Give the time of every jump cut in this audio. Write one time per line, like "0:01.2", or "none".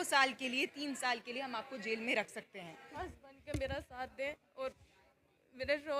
0:03.0

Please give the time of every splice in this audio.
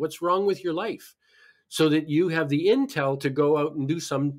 none

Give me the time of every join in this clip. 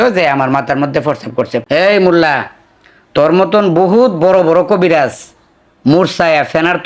0:01.6

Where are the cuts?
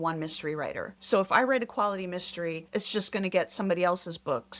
0:00.9
0:02.6

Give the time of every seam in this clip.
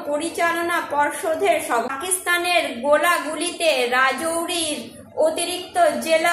0:01.9

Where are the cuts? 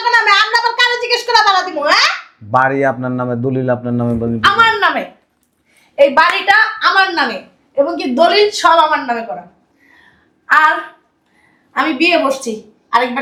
none

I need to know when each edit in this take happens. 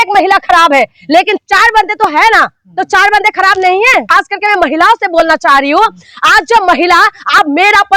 0:04.1

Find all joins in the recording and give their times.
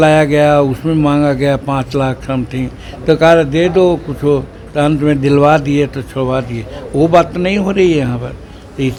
none

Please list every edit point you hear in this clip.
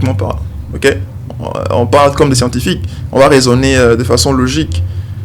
none

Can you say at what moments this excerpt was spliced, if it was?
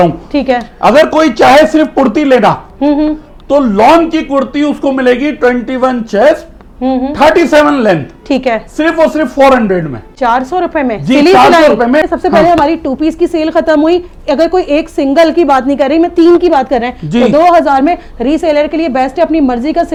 none

